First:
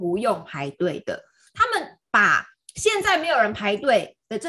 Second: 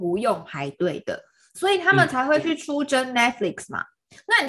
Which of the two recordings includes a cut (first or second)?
first